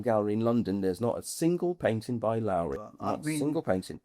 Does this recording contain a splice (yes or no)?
yes